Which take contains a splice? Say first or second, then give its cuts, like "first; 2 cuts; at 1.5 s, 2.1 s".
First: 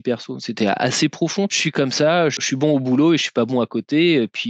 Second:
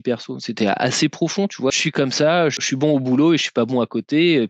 first; 1 cut; at 1.6 s